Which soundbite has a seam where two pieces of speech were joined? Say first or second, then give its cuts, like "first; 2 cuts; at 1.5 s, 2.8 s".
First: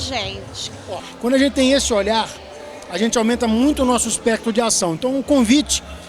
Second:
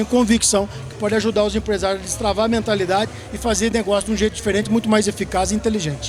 first; 1 cut; at 1.0 s